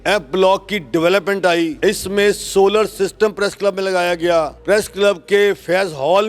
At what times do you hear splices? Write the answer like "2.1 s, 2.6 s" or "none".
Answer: 1.7 s, 4.6 s